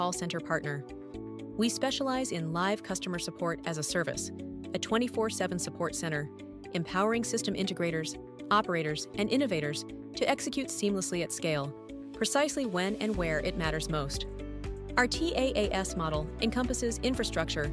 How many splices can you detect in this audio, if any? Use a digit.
0